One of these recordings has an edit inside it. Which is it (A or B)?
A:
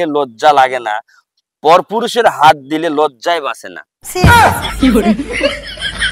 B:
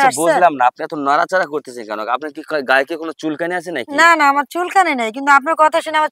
A